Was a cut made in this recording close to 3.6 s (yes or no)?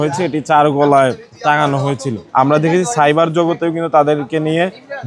no